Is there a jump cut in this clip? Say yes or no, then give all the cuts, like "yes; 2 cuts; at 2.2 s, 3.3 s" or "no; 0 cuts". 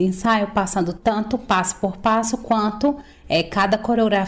yes; 1 cut; at 0.9 s